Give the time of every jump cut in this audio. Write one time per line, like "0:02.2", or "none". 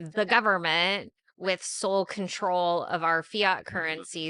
none